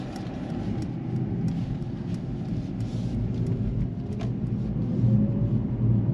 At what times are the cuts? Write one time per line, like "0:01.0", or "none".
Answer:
none